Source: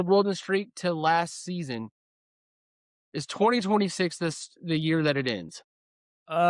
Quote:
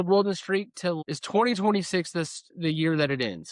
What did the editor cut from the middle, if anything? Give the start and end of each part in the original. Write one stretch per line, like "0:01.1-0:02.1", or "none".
0:01.0-0:03.0